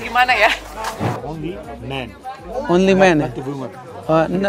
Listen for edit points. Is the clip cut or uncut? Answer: cut